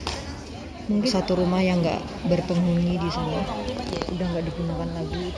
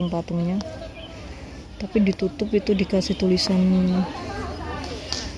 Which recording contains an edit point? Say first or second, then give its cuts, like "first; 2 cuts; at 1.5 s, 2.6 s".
first; 1 cut; at 1.0 s